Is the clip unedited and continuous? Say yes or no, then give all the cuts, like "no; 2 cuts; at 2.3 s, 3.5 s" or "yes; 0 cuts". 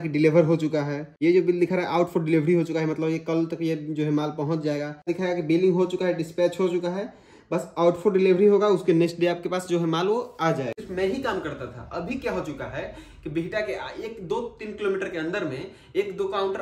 no; 3 cuts; at 1.0 s, 5.1 s, 10.8 s